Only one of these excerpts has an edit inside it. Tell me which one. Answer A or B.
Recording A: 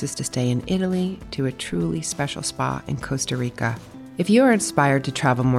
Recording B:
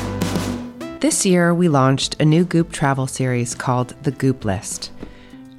B